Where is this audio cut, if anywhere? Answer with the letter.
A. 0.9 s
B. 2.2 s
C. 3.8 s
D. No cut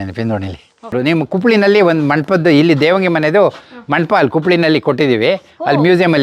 A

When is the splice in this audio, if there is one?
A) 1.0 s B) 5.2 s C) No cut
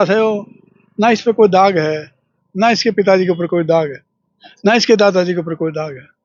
C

